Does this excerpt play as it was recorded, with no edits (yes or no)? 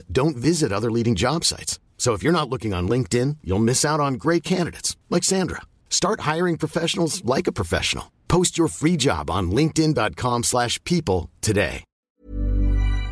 no